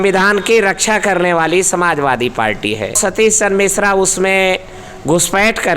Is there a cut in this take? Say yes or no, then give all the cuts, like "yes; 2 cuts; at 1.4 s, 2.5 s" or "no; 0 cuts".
yes; 1 cut; at 3.0 s